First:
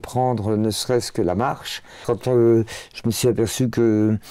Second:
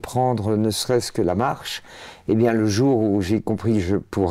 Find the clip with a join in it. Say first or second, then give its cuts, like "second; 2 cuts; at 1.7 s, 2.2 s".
first; 1 cut; at 2.0 s